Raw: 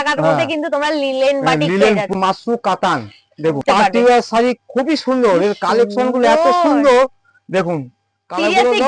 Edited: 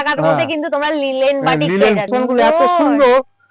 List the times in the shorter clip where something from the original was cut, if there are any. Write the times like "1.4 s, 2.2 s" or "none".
2.1 s